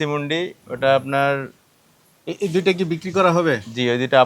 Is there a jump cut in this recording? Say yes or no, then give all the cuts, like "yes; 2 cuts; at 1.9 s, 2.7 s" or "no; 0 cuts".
no; 0 cuts